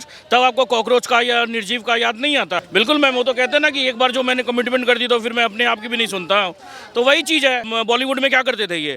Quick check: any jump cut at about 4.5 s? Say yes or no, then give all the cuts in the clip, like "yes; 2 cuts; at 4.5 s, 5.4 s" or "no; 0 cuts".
no; 2 cuts; at 2.6 s, 7.7 s